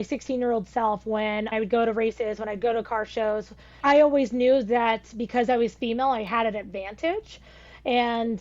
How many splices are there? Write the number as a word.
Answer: two